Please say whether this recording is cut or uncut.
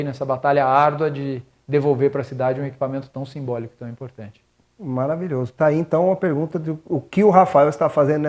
uncut